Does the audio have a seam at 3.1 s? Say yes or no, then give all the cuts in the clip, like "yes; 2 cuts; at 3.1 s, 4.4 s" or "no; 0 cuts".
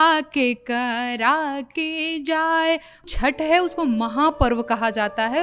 yes; 1 cut; at 3.1 s